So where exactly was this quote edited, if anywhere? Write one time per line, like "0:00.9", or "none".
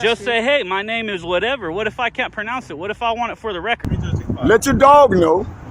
0:03.8